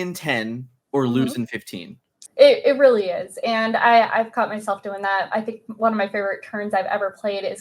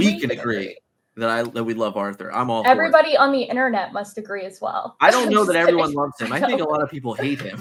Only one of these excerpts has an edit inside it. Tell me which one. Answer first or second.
first